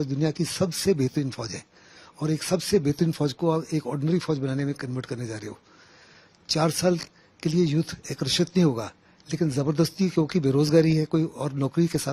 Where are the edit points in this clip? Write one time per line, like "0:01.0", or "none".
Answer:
none